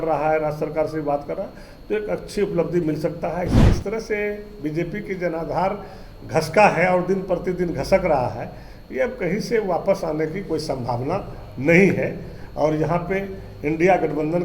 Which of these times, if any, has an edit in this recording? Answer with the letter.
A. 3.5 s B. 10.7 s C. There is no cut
A